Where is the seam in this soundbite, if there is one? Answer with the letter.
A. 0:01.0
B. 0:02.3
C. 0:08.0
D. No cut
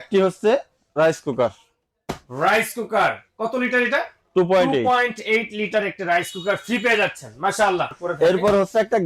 C